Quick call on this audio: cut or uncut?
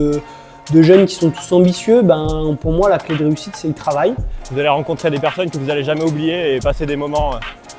cut